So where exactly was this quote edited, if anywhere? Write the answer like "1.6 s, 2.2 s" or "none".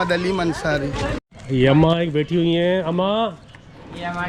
1.2 s